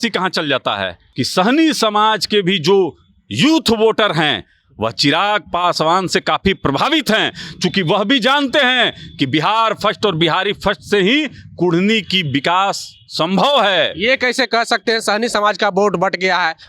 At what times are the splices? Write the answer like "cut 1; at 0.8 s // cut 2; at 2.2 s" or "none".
cut 1; at 1.0 s